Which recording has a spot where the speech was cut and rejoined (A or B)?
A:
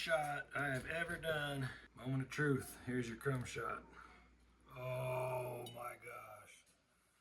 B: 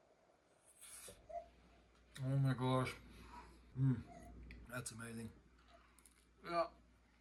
A